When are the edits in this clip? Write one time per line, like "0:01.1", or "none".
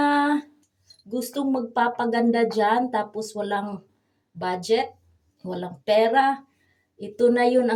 none

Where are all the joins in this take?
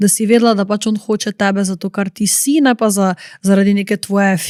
none

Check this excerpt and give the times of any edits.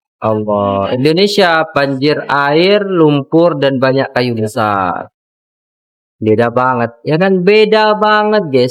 none

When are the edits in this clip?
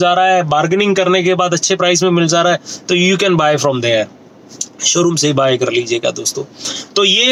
none

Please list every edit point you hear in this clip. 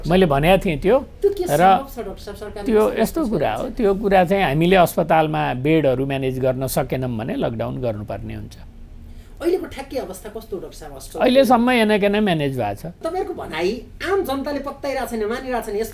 0:13.0

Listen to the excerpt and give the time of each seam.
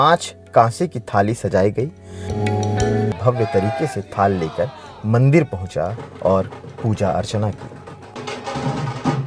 0:03.1

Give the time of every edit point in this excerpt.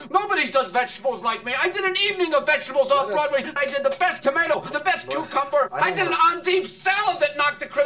none

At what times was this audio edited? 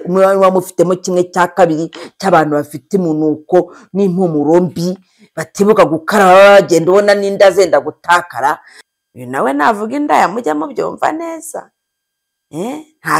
0:08.8

